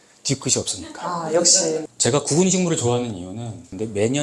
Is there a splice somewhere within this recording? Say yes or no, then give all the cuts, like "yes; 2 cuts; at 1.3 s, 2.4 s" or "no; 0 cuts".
yes; 1 cut; at 1.9 s